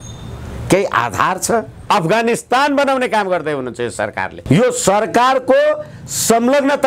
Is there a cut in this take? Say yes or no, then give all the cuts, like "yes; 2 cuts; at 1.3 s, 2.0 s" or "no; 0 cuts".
yes; 1 cut; at 1.8 s